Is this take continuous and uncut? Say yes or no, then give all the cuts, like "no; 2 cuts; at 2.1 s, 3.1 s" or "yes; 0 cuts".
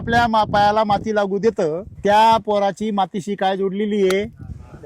no; 1 cut; at 1.9 s